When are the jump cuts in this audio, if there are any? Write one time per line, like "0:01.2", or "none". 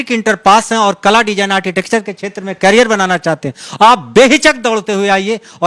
none